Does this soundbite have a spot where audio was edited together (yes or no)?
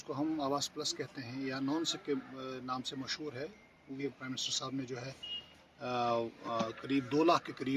yes